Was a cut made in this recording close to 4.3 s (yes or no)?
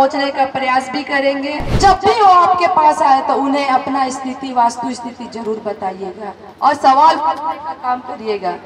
no